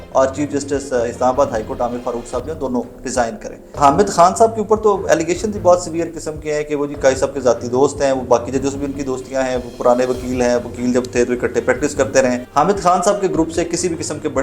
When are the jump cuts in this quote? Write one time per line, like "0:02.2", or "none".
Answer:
0:03.8
0:12.5